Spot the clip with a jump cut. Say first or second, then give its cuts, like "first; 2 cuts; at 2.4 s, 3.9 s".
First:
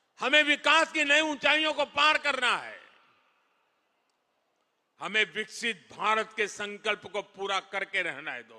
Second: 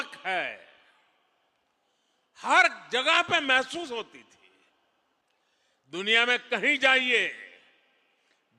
second; 1 cut; at 5.2 s